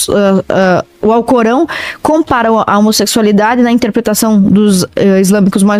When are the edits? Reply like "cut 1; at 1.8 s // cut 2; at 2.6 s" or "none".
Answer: none